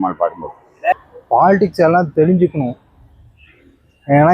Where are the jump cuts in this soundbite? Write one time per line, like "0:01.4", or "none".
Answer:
0:01.0